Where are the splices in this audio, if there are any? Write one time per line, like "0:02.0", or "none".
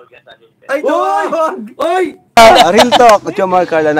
0:02.2

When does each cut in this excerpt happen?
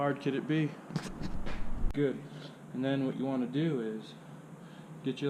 0:01.9

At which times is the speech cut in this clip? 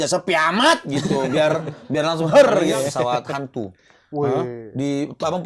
0:02.8

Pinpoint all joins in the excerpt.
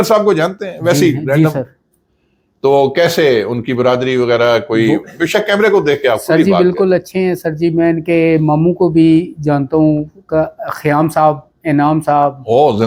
none

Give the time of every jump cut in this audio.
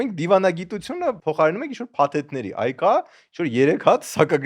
0:01.2

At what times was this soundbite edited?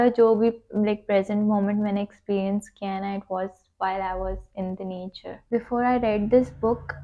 0:05.5

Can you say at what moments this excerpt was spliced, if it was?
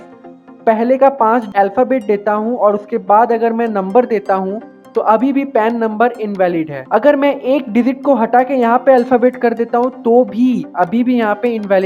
0:01.5
0:06.8

